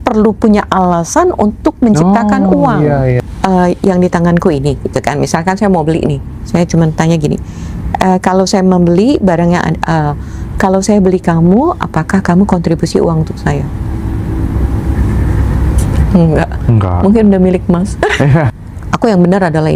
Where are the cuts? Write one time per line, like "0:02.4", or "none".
0:03.2
0:18.5

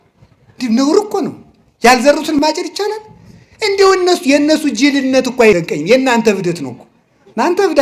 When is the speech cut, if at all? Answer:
0:02.4

